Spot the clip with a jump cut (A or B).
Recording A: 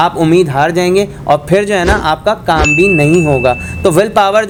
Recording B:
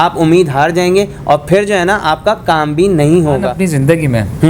B